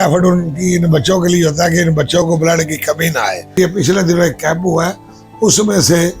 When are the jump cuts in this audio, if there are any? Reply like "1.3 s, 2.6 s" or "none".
3.6 s